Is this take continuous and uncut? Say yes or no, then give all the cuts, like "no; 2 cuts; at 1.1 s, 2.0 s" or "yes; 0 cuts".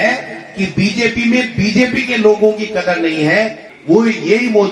no; 1 cut; at 3.6 s